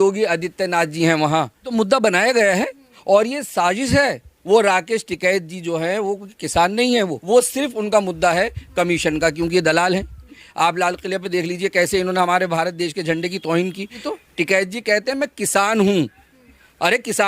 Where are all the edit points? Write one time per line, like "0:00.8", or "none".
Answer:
0:01.7
0:04.3
0:07.2
0:10.4
0:14.0